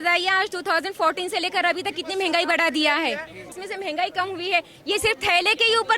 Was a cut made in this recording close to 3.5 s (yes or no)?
yes